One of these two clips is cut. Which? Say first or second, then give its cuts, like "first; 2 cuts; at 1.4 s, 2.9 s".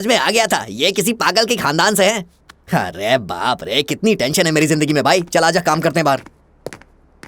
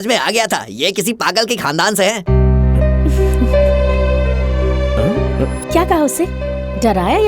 second; 1 cut; at 2.2 s